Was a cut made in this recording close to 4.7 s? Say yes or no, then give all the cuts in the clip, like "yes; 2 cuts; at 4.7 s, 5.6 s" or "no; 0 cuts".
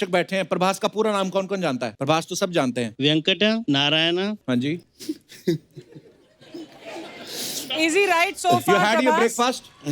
yes; 4 cuts; at 1.9 s, 2.9 s, 3.6 s, 4.7 s